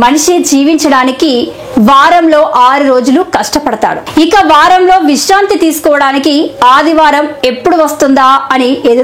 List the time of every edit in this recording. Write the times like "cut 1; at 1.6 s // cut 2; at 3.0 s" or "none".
cut 1; at 4.0 s